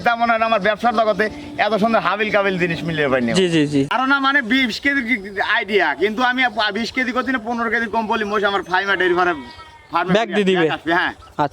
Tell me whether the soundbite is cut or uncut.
cut